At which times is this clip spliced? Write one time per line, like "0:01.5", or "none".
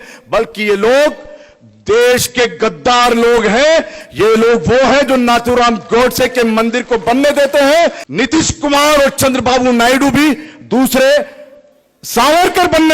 0:08.0